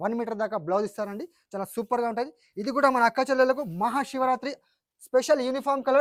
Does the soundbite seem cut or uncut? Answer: uncut